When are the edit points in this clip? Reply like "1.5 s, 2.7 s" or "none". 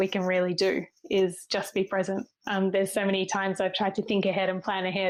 none